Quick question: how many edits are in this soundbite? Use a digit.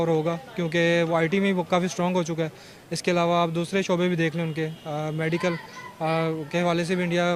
0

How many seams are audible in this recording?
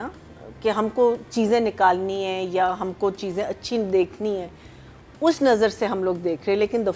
0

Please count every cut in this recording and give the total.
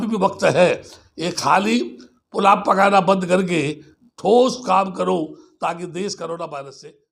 0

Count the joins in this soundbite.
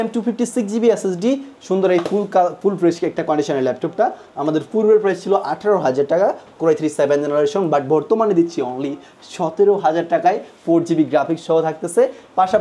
0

